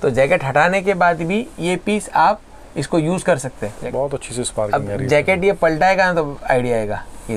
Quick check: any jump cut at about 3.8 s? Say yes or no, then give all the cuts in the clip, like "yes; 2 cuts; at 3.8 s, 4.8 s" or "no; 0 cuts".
yes; 1 cut; at 3.8 s